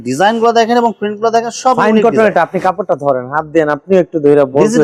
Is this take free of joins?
yes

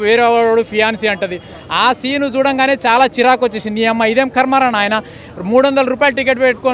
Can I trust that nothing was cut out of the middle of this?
yes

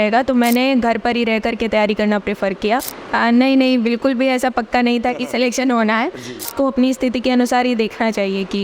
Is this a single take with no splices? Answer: no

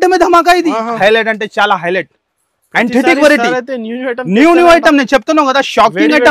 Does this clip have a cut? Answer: yes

